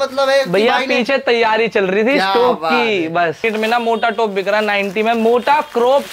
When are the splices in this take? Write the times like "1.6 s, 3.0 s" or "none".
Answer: 3.4 s